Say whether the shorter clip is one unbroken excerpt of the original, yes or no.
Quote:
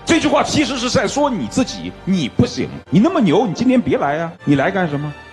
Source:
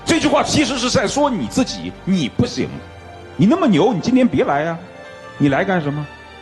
no